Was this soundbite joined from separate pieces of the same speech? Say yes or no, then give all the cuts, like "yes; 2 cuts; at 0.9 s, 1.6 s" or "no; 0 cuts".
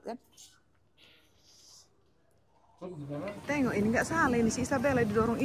yes; 1 cut; at 3.4 s